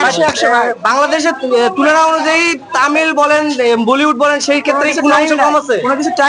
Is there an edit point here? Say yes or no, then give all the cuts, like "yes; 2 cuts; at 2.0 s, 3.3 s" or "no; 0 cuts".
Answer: no; 0 cuts